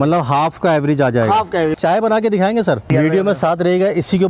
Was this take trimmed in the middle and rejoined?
yes; 2 cuts; at 1.8 s, 2.9 s

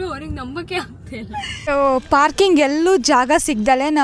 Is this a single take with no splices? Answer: no; 1 cut; at 1.7 s

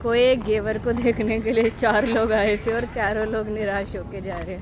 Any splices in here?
no; 0 cuts

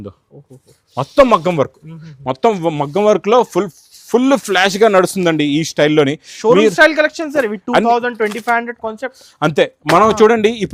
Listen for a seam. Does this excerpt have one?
no; 0 cuts

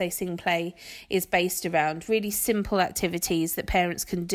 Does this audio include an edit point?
no; 0 cuts

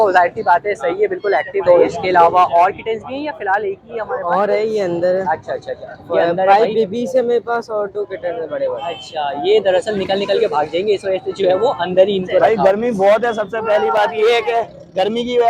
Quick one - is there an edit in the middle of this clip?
yes; 2 cuts; at 1.6 s, 12.4 s

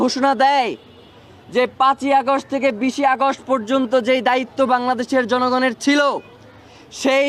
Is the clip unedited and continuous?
yes; 0 cuts

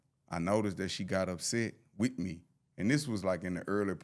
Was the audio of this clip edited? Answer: no; 0 cuts

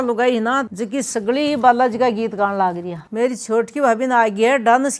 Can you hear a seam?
no; 0 cuts

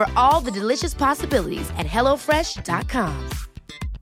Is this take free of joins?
yes; 0 cuts

